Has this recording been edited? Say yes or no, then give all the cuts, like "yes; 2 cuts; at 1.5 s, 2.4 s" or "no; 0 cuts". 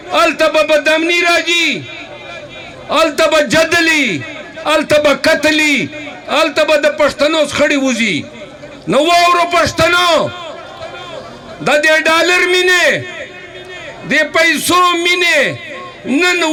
no; 0 cuts